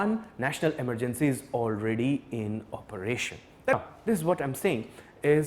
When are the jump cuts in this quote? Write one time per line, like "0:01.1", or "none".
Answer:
0:03.7